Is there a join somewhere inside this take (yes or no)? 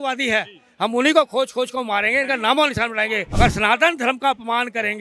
yes